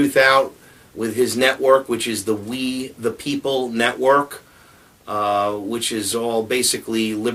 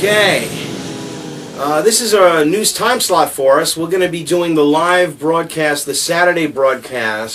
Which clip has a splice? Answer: second; 1 cut; at 6.4 s

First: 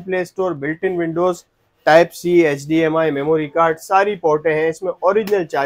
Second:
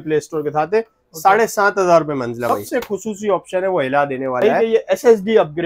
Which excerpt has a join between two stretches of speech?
second; 2 cuts; at 2.5 s, 4.4 s

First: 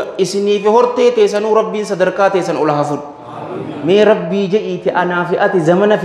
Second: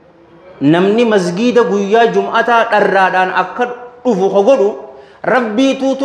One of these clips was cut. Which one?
first; 1 cut; at 3.7 s

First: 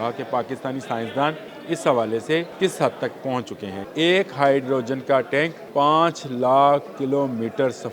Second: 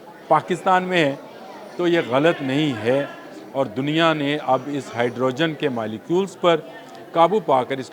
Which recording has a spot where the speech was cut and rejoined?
first; 4 cuts; at 1.5 s, 2.5 s, 3.7 s, 5.6 s

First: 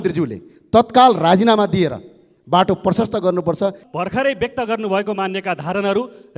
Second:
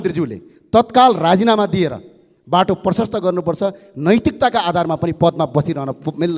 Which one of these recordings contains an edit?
first; 1 cut; at 3.9 s

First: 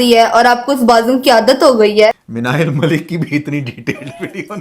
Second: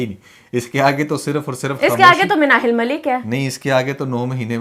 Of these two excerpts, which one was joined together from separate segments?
first; 1 cut; at 2.1 s

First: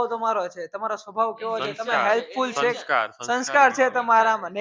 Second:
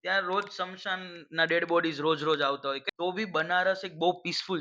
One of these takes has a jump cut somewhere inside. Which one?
second; 1 cut; at 2.9 s

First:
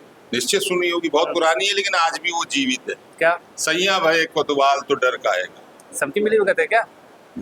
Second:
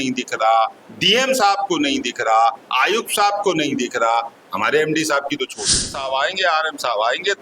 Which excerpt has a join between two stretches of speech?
second; 1 cut; at 5.9 s

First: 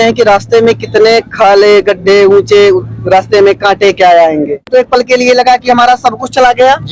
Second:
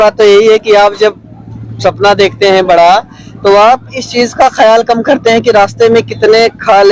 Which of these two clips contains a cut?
first; 1 cut; at 4.7 s

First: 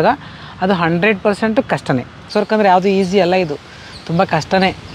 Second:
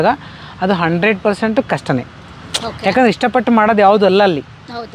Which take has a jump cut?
first; 1 cut; at 2.2 s

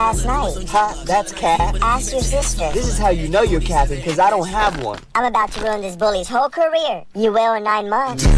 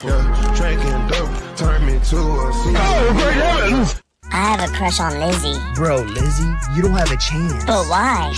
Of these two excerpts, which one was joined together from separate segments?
second; 1 cut; at 4.1 s

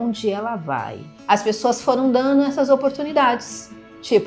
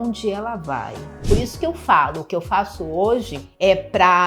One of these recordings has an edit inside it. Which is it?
second; 1 cut; at 1.1 s

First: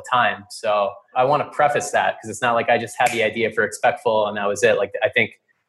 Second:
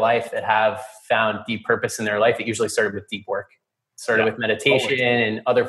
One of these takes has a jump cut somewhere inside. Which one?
first; 1 cut; at 1.1 s

